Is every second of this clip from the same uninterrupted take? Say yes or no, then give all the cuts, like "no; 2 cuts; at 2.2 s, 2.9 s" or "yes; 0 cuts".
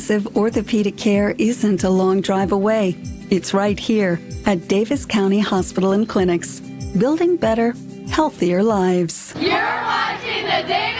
no; 1 cut; at 9.2 s